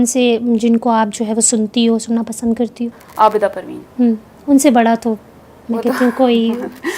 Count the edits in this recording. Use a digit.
0